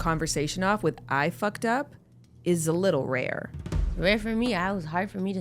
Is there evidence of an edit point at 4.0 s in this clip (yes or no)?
yes